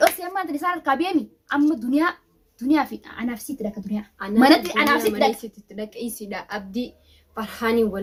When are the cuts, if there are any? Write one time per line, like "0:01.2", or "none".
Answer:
none